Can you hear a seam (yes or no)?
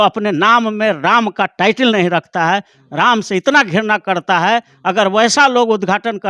no